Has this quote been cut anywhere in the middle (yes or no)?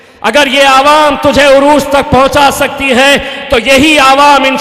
no